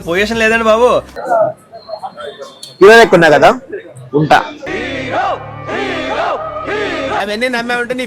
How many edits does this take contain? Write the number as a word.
one